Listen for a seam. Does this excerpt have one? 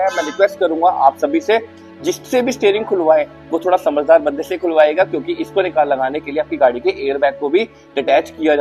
no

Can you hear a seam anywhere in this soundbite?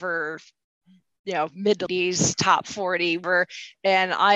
yes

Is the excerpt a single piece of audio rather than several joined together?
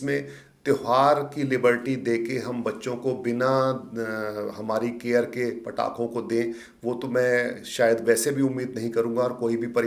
yes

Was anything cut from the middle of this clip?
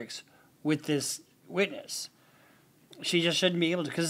no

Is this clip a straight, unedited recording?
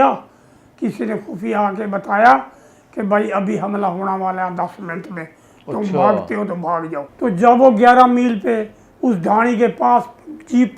no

